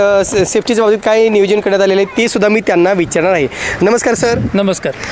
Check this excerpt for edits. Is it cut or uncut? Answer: uncut